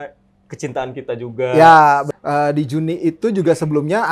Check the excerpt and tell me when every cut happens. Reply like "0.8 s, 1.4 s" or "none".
2.1 s